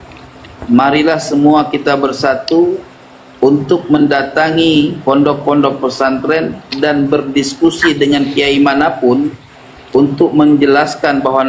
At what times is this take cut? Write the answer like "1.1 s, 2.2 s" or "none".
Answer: none